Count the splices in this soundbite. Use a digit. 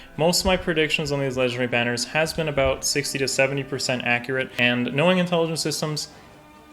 1